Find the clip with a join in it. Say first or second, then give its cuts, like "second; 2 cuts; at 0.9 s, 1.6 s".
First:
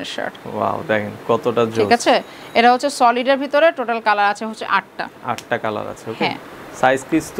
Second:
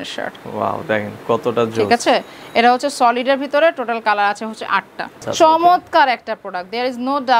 second; 1 cut; at 5.2 s